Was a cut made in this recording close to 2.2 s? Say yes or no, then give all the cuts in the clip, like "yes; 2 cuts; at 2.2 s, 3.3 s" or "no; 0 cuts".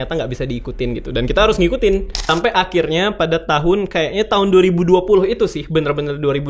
yes; 1 cut; at 2.2 s